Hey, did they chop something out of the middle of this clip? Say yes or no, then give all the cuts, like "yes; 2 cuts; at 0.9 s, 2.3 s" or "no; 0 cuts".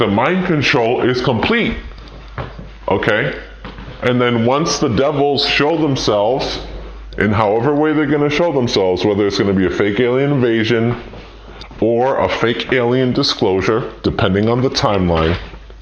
yes; 1 cut; at 8.9 s